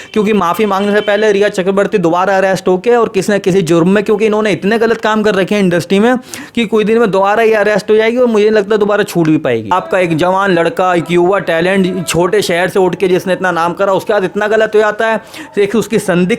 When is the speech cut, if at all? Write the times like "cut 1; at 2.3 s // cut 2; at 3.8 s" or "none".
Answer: cut 1; at 9.7 s